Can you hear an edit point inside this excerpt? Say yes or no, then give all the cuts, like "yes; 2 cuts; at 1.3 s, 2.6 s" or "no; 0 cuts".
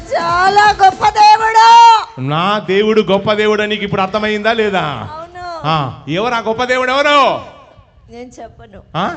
no; 0 cuts